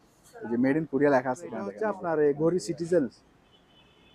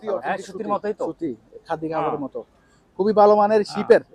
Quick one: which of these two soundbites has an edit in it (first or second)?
first